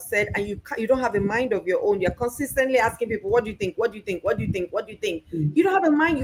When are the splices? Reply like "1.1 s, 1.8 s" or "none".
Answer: none